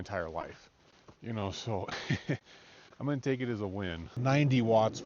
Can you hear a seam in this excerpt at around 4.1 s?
yes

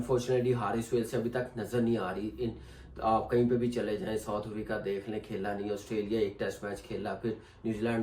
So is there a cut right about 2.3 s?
no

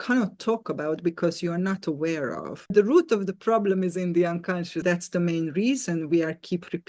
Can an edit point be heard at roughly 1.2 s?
no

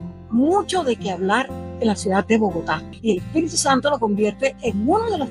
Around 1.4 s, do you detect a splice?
no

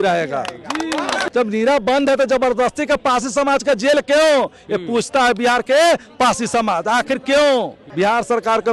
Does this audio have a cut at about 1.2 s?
yes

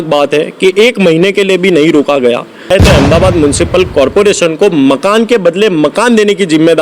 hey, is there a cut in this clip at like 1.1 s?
no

